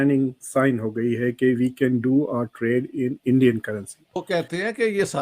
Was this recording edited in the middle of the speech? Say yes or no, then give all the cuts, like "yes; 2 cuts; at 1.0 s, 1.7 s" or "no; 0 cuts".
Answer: yes; 1 cut; at 4.2 s